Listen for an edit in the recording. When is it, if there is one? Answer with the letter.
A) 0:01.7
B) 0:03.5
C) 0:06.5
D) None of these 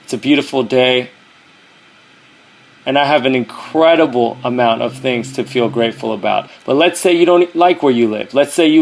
C